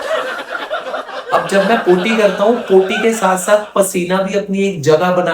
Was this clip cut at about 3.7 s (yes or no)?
no